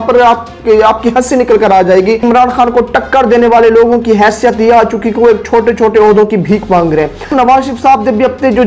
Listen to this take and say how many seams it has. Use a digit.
2